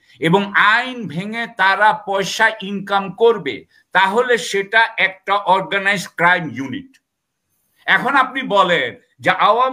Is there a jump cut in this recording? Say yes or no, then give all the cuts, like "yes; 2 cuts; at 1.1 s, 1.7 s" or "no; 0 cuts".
no; 0 cuts